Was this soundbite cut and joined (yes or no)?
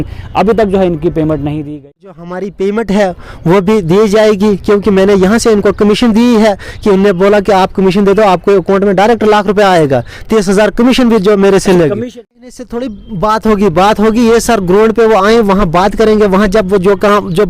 yes